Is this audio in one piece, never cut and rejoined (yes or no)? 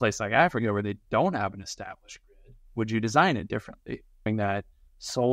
no